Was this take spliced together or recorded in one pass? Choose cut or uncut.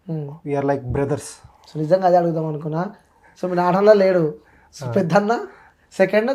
uncut